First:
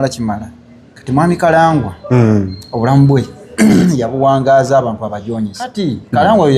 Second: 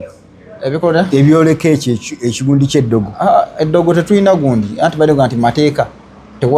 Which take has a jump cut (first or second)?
first